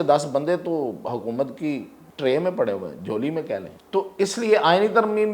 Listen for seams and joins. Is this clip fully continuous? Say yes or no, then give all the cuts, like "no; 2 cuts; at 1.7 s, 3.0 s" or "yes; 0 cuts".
no; 2 cuts; at 2.0 s, 3.8 s